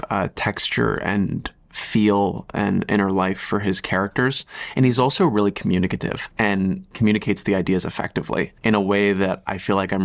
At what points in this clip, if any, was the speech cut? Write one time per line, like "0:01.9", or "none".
0:06.7
0:08.5